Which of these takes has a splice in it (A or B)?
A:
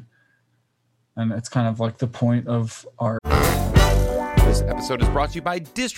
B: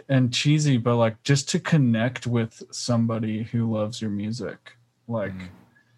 A